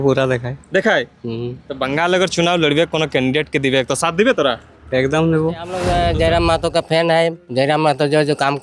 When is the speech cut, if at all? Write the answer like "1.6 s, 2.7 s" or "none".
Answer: 5.8 s